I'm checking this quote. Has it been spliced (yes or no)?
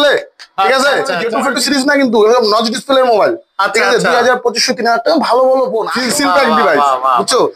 yes